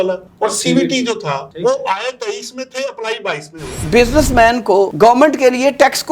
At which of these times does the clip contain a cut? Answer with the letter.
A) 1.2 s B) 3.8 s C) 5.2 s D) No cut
B